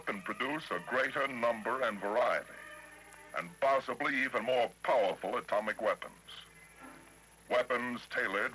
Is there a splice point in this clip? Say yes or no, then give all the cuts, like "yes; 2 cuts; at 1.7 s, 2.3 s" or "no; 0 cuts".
no; 0 cuts